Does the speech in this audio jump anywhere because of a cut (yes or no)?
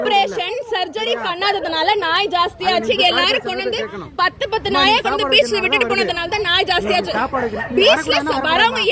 no